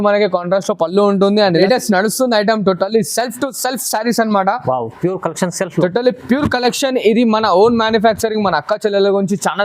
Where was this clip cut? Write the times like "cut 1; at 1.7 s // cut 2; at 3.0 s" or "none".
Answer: cut 1; at 1.6 s